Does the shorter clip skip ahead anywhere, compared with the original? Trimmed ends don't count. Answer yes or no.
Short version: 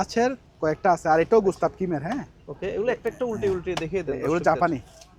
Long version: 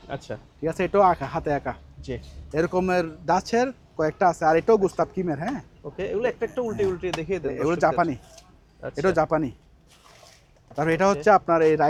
no